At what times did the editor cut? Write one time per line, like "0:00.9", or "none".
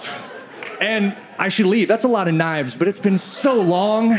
0:01.3